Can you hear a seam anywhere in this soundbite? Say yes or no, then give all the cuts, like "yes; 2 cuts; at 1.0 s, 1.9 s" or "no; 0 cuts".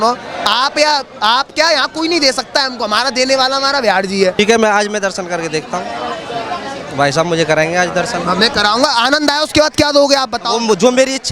yes; 1 cut; at 4.4 s